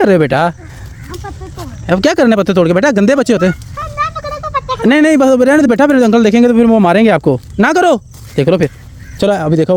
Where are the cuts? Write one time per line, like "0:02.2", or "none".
none